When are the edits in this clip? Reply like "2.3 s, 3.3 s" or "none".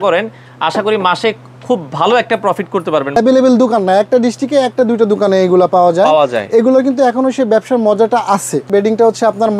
3.2 s, 8.7 s